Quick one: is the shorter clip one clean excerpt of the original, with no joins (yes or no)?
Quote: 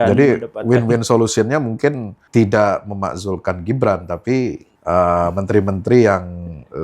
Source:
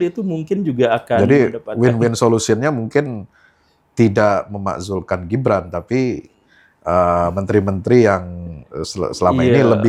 no